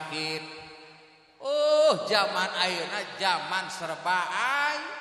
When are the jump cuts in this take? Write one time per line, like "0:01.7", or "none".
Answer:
none

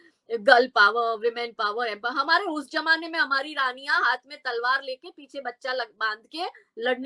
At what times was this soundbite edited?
none

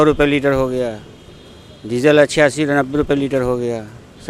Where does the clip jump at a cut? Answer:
none

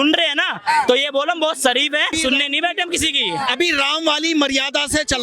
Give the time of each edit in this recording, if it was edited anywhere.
0:02.1

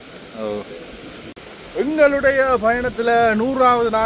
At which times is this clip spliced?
0:01.3

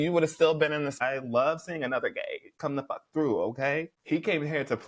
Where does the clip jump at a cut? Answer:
0:01.0
0:02.5

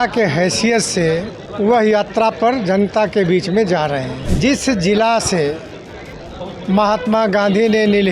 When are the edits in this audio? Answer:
0:01.4
0:04.2

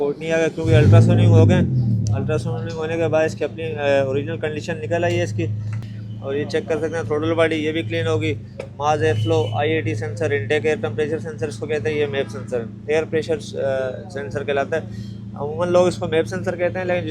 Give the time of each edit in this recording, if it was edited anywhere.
0:05.8

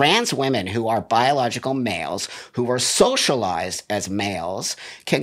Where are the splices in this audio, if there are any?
none

